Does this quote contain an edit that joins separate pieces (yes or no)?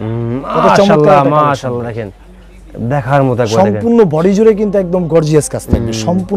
no